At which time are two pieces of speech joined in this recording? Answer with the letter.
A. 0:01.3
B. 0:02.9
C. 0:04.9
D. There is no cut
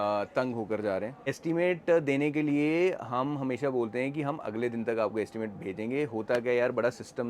A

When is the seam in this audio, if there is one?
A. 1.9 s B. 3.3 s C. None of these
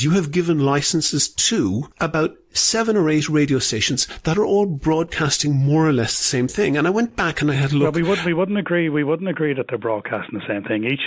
A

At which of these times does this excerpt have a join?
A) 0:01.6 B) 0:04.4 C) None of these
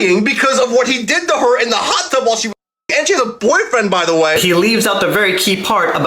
B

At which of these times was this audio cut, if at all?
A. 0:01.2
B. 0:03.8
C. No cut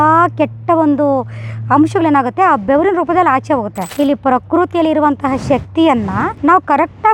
B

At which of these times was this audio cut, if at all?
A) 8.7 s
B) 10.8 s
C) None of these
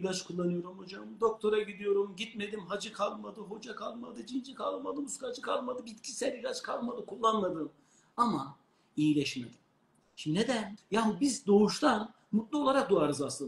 B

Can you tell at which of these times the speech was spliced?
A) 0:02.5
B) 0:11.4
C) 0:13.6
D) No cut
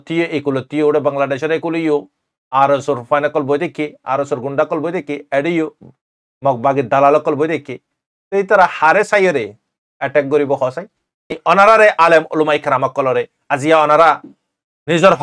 B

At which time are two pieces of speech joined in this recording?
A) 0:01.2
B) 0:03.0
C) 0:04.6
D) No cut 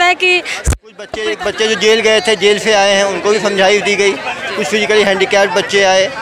A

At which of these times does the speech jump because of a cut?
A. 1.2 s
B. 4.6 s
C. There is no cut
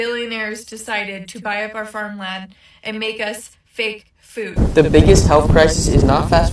B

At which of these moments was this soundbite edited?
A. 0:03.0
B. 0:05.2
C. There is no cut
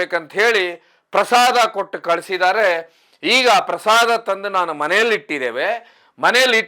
C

